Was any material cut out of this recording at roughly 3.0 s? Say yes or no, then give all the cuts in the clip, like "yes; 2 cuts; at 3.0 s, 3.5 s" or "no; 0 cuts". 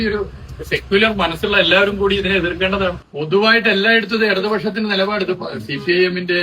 yes; 1 cut; at 3.0 s